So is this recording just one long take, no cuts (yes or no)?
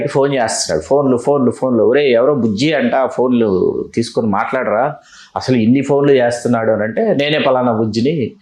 yes